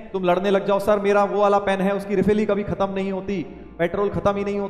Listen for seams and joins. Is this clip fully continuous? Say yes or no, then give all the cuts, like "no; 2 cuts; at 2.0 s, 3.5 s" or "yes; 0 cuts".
yes; 0 cuts